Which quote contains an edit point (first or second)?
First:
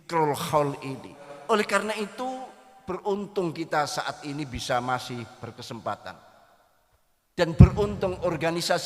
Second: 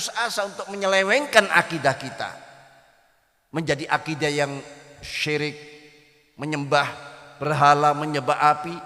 first